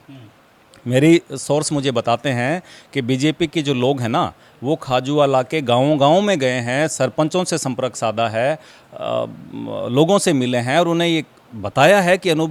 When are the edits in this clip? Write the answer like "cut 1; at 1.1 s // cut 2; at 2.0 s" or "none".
none